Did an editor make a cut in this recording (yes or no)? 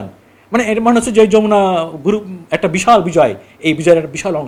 no